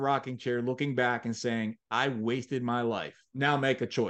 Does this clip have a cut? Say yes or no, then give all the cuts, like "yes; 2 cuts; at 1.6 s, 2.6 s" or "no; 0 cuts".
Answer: yes; 1 cut; at 3.2 s